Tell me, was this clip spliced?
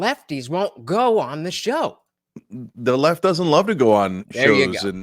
no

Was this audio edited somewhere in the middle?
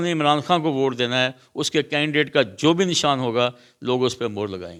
no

